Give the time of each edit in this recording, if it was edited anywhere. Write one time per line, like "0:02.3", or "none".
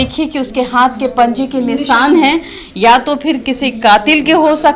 none